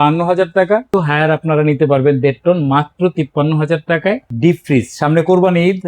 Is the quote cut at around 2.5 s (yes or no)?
no